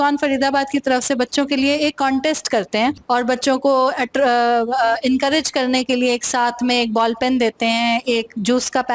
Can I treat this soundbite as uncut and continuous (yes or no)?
no